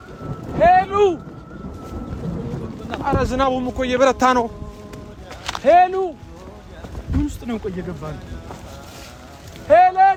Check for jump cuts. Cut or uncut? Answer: uncut